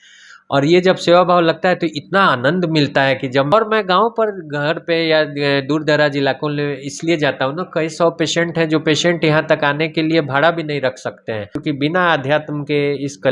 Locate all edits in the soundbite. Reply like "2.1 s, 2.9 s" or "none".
3.5 s, 11.5 s